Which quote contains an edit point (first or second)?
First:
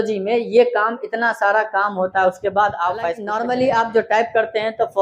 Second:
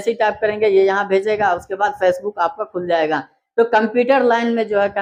first